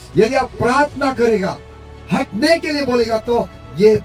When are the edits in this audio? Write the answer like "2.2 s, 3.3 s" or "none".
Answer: none